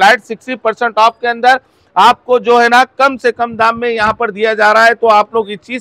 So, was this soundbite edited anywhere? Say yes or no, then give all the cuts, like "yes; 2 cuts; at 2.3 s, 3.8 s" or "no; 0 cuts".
no; 0 cuts